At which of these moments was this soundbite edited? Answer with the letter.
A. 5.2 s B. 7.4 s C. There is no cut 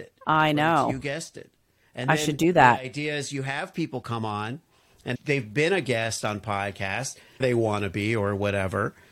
B